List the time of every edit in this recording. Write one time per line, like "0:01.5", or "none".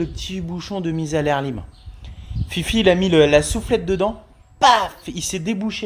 none